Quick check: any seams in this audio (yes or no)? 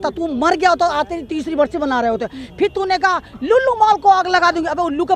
no